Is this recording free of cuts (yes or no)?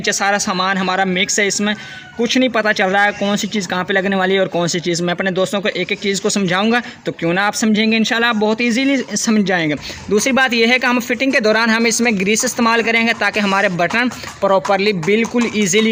yes